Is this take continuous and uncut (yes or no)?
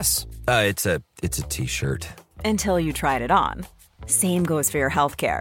yes